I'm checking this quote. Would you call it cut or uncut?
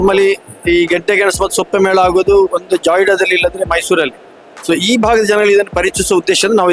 uncut